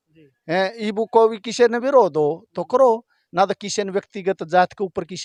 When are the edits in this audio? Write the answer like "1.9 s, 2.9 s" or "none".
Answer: none